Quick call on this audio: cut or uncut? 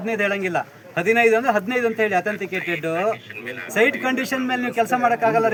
uncut